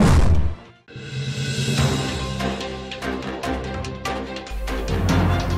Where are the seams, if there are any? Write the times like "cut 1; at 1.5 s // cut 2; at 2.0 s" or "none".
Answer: cut 1; at 3.2 s

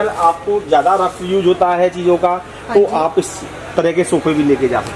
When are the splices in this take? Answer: none

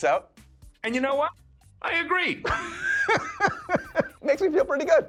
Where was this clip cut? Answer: none

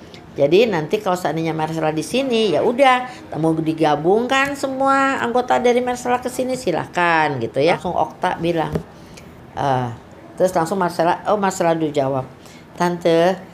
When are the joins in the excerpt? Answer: cut 1; at 7.8 s

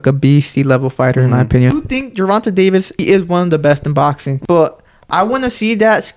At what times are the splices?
cut 1; at 1.7 s // cut 2; at 3.0 s // cut 3; at 4.3 s

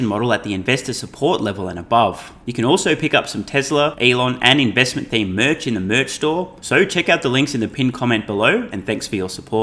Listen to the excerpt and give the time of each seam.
cut 1; at 2.4 s // cut 2; at 4.0 s // cut 3; at 6.6 s

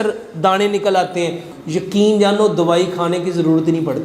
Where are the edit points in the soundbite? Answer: cut 1; at 1.5 s

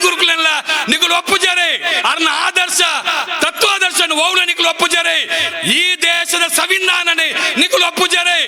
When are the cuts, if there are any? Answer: none

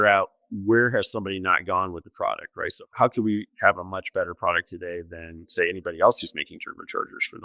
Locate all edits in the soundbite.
cut 1; at 2.9 s

